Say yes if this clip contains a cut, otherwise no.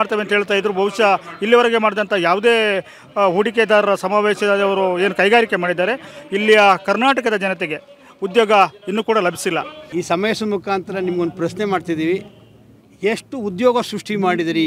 yes